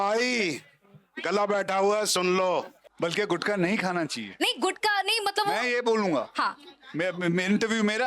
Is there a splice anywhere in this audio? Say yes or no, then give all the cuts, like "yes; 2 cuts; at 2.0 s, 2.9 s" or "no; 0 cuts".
yes; 1 cut; at 2.8 s